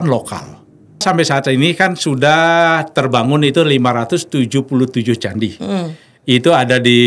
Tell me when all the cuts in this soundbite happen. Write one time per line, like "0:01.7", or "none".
0:01.0

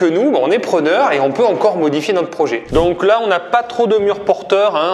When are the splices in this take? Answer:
0:02.6

